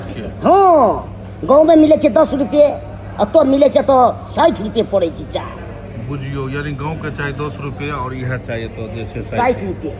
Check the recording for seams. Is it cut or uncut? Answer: uncut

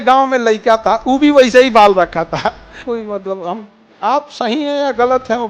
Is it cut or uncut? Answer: cut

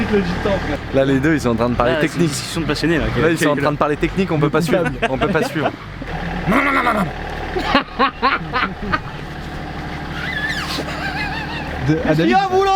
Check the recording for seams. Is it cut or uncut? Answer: cut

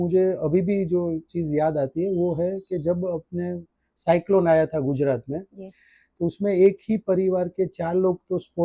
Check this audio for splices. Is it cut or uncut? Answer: uncut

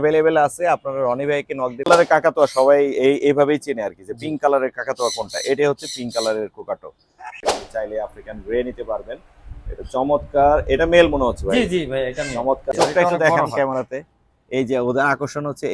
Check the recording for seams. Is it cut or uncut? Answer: cut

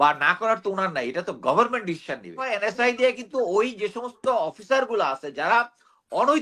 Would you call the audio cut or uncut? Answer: cut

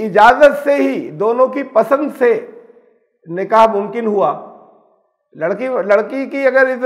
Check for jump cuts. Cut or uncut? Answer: uncut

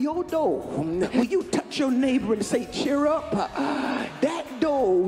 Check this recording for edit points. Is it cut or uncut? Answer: cut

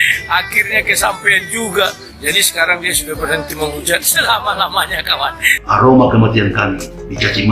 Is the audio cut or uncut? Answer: cut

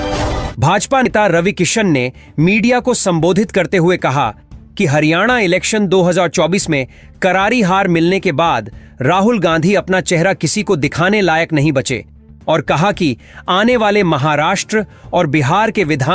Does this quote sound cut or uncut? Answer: cut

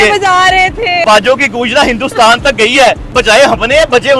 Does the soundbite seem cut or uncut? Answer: cut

